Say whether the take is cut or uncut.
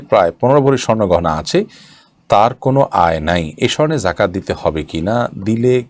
uncut